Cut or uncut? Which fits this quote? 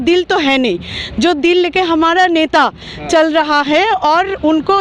uncut